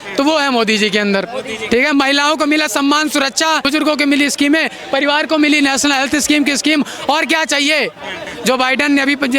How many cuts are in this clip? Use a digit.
2